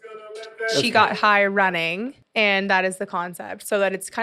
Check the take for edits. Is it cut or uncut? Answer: uncut